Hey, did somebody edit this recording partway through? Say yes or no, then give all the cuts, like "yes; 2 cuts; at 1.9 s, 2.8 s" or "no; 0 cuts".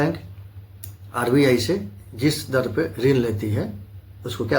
no; 0 cuts